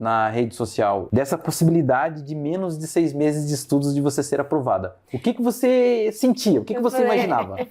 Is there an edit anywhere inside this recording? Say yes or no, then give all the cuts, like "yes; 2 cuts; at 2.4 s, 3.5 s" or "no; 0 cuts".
yes; 1 cut; at 1.0 s